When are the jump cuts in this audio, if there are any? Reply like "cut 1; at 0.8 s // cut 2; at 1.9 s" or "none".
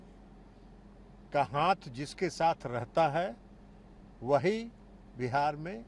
none